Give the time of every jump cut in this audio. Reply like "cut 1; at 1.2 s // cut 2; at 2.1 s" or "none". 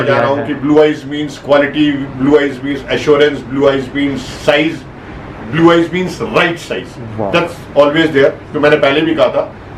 none